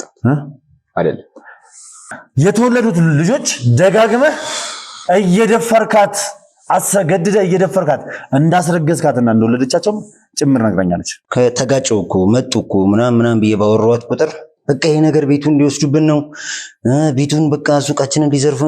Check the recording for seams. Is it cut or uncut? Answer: cut